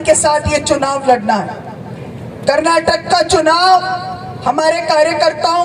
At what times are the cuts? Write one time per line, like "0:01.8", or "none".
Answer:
none